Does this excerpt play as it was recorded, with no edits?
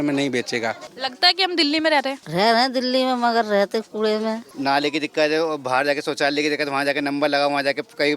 no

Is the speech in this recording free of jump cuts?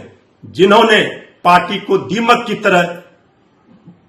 yes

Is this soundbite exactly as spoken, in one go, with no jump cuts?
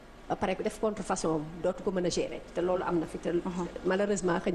yes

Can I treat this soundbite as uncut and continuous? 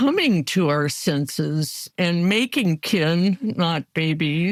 yes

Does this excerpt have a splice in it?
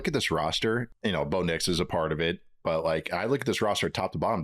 yes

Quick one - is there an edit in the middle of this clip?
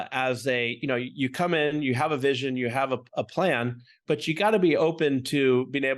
no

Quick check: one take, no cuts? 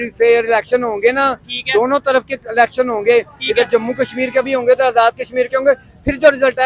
yes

